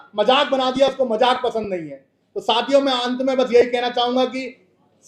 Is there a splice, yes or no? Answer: no